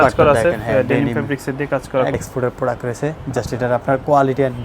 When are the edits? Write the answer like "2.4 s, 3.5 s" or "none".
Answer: 2.2 s